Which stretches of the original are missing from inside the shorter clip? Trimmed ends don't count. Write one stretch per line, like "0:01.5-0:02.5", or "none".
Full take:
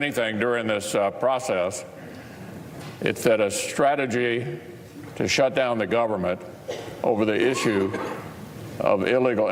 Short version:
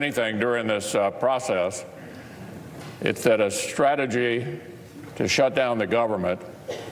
none